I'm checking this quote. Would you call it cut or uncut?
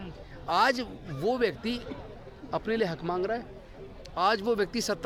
uncut